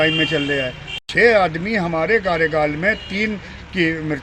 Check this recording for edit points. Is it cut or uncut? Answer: cut